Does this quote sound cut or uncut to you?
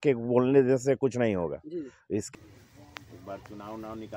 cut